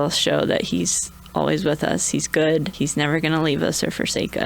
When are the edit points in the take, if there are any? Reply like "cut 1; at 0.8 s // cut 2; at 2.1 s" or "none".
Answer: cut 1; at 2.7 s